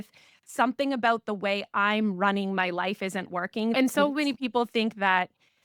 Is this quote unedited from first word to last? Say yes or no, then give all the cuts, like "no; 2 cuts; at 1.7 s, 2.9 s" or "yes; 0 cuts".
no; 1 cut; at 3.8 s